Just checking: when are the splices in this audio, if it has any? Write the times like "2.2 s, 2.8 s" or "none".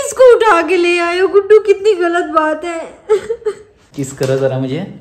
3.8 s